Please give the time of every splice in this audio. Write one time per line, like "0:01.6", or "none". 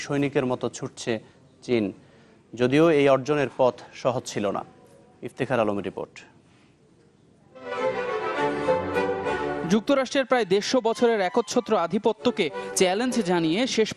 0:10.7